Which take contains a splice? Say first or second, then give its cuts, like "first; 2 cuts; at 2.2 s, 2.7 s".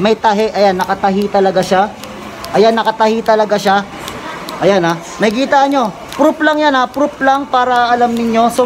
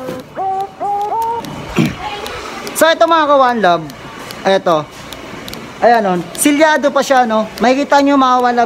second; 1 cut; at 1.6 s